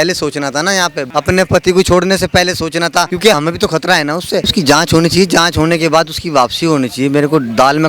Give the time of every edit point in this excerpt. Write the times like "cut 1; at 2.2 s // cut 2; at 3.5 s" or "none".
cut 1; at 1.0 s // cut 2; at 3.3 s // cut 3; at 4.5 s